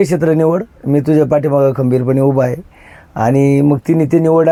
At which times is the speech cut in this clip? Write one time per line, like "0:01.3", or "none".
none